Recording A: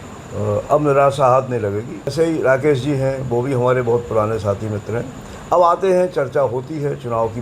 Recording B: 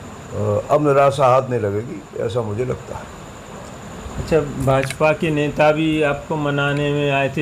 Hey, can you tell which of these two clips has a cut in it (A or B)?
A